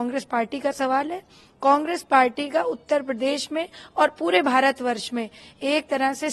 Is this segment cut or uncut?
uncut